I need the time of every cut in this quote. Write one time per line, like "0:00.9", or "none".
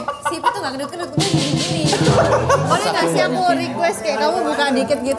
0:02.7